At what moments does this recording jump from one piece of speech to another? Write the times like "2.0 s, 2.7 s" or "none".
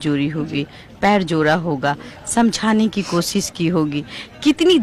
none